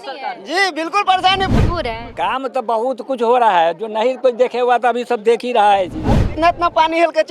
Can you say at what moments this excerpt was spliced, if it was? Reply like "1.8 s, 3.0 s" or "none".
1.5 s, 6.4 s